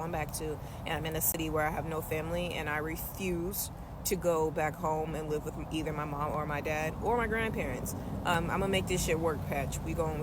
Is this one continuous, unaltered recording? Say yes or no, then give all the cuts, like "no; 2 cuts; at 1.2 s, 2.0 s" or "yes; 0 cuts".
yes; 0 cuts